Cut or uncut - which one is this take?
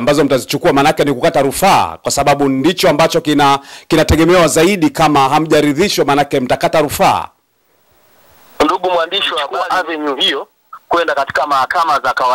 cut